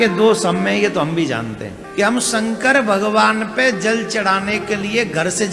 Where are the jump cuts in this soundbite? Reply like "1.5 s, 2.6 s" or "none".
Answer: 1.8 s